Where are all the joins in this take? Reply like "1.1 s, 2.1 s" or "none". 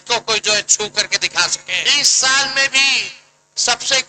1.8 s